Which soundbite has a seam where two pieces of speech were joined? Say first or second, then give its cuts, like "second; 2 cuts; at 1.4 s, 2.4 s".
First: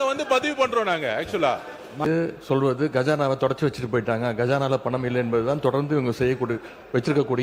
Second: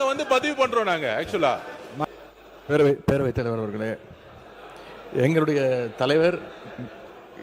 first; 1 cut; at 2.0 s